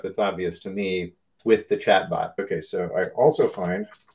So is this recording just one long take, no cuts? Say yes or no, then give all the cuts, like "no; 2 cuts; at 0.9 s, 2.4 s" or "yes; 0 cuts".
no; 2 cuts; at 1.2 s, 2.4 s